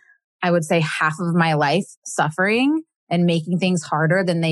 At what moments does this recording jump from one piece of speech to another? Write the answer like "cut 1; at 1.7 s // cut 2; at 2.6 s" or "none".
none